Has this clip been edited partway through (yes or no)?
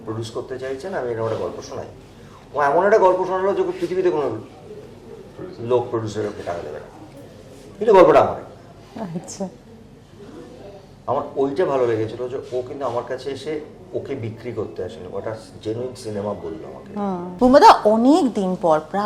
yes